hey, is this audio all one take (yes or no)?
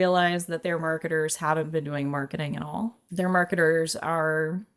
no